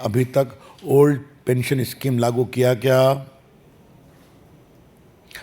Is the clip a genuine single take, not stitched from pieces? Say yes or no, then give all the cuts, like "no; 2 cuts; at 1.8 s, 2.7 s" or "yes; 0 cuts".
yes; 0 cuts